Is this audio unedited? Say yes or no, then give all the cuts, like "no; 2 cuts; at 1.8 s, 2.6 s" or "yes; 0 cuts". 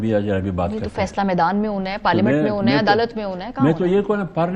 yes; 0 cuts